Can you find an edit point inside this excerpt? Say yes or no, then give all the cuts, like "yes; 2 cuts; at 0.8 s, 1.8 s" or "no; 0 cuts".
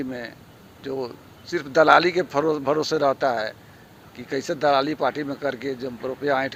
no; 0 cuts